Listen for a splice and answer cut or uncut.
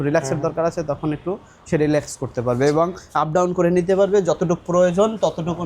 uncut